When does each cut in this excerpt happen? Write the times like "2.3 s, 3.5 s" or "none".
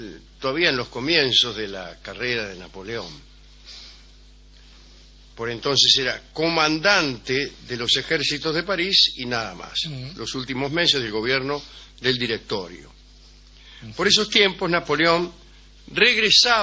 7.8 s